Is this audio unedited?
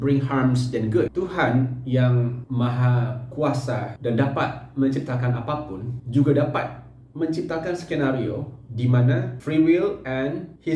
no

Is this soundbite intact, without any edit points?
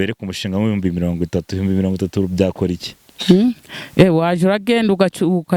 yes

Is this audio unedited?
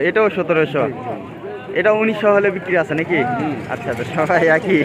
yes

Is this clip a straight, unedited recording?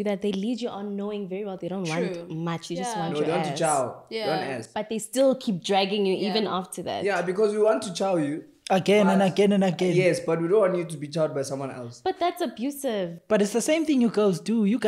yes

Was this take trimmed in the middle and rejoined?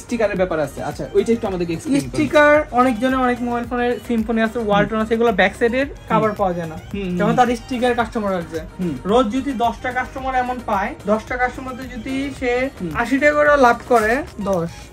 no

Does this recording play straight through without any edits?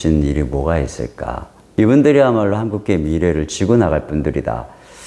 no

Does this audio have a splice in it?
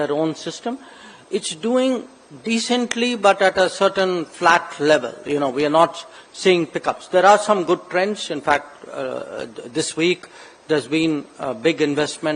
no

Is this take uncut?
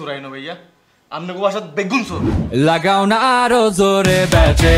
no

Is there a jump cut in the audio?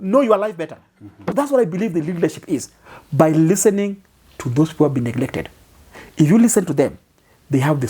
yes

